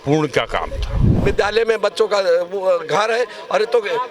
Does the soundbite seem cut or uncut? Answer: cut